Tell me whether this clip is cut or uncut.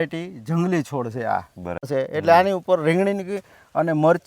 cut